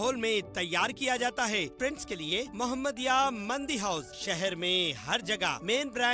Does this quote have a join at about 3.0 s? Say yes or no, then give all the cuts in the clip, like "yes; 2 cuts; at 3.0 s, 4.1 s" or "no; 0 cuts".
no; 1 cut; at 1.7 s